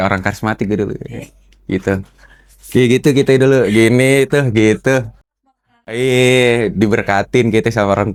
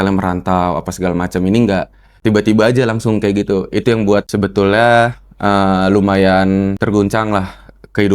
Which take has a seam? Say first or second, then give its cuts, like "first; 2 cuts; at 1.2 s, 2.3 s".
second; 3 cuts; at 2.0 s, 4.3 s, 6.8 s